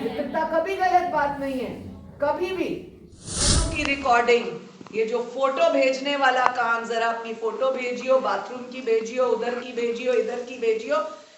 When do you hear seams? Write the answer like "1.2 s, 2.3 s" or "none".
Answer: 3.6 s